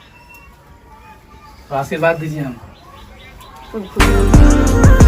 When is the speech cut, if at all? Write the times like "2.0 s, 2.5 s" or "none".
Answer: 4.0 s